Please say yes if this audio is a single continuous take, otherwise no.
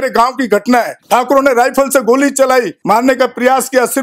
no